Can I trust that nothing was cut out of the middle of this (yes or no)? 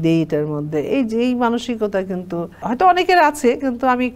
no